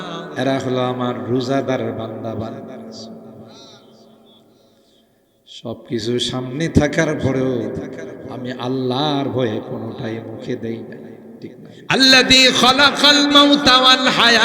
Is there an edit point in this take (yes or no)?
yes